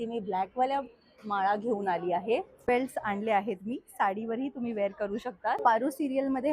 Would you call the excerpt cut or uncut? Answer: cut